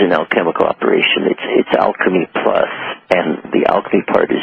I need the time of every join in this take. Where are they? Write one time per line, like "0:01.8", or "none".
0:01.3